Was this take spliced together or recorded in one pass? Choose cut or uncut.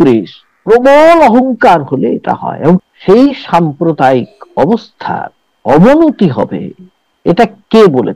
cut